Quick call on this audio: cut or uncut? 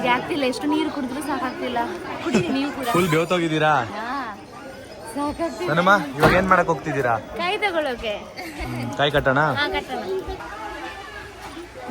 uncut